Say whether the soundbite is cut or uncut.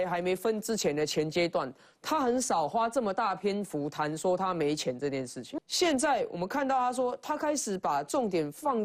cut